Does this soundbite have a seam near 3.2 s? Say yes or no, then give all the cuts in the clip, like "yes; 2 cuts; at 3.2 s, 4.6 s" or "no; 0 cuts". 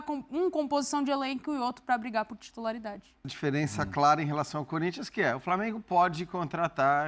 yes; 1 cut; at 3.2 s